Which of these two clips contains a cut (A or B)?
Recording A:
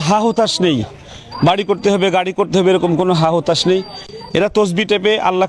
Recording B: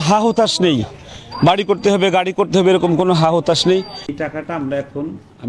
B